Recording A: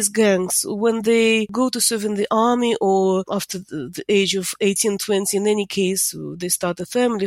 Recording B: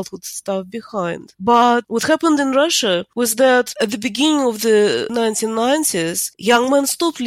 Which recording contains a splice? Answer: B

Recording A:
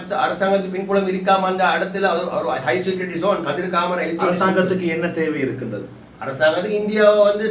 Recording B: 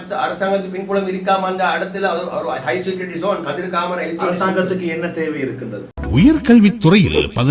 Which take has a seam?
B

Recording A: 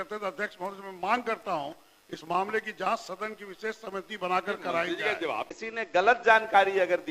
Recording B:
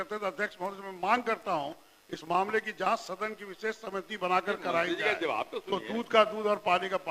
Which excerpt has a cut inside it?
A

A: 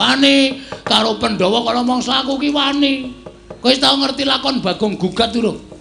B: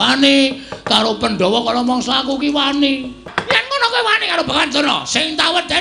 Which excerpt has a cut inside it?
B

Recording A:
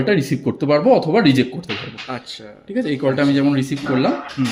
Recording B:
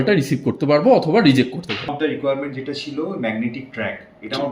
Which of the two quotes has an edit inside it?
B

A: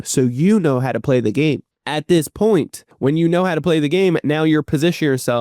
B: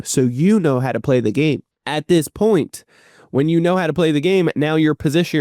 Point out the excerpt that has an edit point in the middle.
A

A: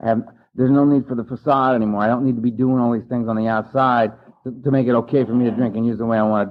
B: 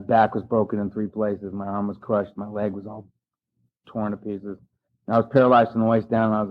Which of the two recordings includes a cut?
B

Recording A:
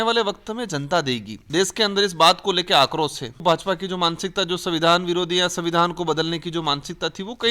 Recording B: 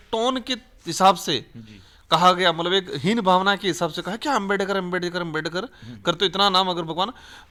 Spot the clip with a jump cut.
A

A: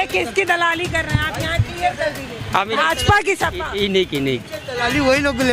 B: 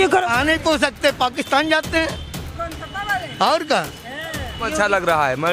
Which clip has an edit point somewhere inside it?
B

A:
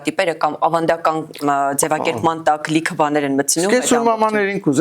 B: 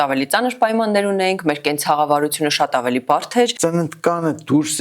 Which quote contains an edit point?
B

